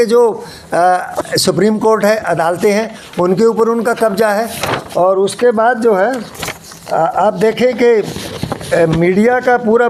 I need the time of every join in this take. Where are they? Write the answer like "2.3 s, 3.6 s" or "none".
none